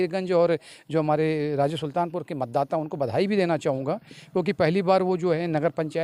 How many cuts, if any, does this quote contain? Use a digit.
0